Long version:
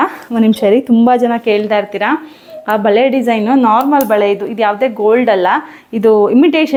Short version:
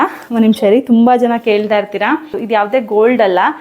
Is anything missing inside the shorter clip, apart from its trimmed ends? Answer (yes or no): yes